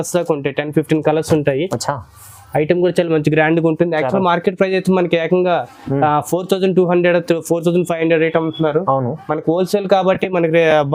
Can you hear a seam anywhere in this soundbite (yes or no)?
no